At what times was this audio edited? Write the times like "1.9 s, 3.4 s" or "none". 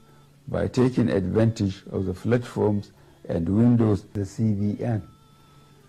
4.3 s